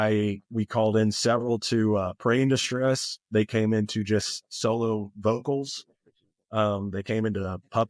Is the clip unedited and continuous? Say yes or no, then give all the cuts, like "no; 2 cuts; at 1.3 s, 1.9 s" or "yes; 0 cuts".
yes; 0 cuts